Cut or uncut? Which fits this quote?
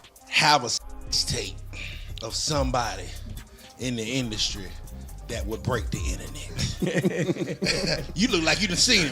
uncut